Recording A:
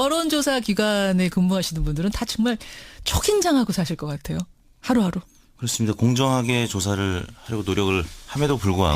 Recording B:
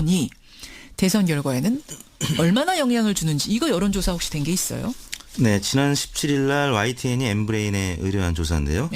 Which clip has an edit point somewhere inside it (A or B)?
B